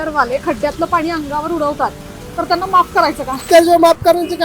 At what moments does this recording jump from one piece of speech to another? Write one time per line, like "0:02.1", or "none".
0:03.4